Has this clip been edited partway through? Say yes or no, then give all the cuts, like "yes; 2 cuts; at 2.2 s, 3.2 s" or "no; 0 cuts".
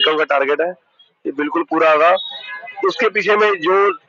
no; 0 cuts